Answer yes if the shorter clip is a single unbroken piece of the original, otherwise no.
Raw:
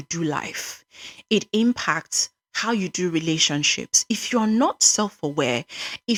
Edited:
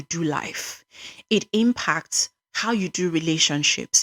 yes